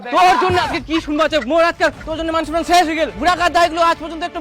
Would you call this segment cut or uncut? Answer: uncut